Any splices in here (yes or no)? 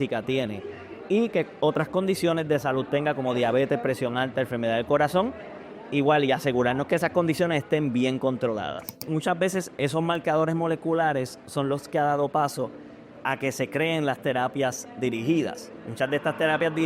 yes